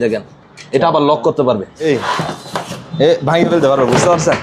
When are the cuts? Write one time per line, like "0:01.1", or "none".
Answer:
0:01.9